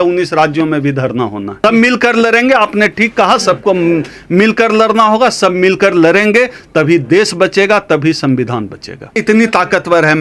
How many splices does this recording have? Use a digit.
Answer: 2